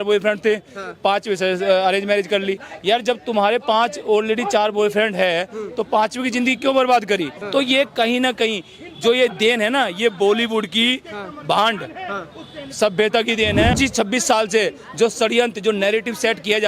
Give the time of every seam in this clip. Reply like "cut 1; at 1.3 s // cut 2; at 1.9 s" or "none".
cut 1; at 7.4 s // cut 2; at 13.7 s